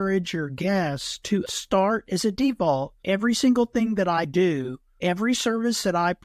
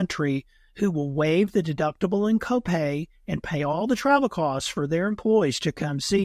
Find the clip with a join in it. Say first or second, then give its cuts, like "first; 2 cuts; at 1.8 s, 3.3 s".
first; 3 cuts; at 1.5 s, 3.0 s, 4.8 s